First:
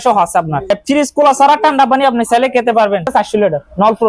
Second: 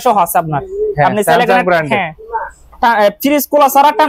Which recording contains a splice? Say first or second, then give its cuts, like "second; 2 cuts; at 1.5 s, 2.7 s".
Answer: first; 2 cuts; at 0.7 s, 3.1 s